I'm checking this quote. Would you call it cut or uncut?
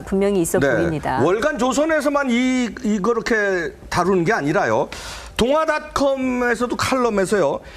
uncut